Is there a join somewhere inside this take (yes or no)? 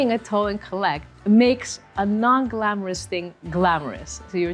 yes